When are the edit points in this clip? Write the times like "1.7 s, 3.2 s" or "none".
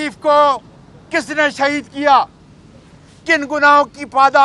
none